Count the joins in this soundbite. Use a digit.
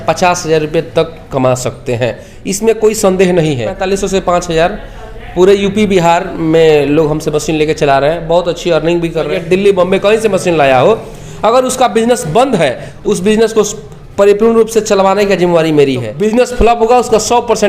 4